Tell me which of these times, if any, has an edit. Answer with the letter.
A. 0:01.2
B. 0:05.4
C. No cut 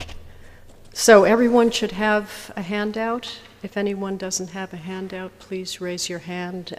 C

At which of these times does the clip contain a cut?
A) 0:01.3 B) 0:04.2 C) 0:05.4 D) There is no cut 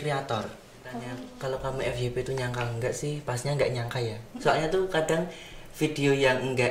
A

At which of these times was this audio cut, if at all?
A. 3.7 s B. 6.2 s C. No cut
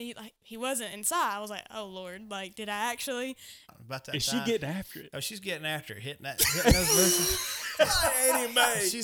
A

